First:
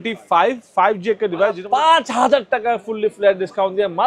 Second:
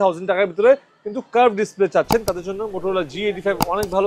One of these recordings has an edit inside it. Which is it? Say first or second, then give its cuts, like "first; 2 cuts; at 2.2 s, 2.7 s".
first; 1 cut; at 1.6 s